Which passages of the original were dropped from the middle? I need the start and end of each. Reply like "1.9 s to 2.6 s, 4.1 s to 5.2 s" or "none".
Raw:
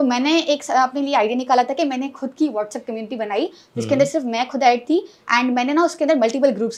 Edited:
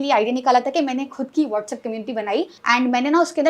3.6 s to 5.2 s